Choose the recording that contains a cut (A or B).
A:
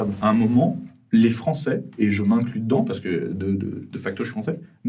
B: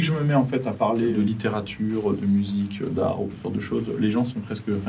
B